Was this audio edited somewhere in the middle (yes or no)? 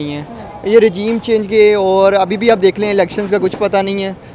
no